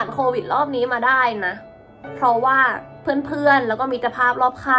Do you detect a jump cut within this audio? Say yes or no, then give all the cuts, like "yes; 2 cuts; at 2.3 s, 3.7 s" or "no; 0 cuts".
no; 0 cuts